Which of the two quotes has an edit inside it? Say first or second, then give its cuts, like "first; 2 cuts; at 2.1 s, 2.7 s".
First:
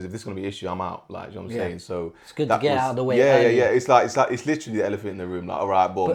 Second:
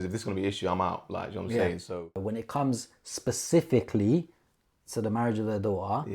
second; 1 cut; at 2.1 s